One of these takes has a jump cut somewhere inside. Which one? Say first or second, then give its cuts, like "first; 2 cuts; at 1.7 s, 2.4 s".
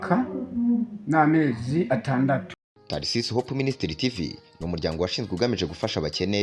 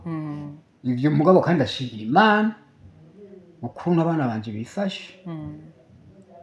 first; 1 cut; at 2.7 s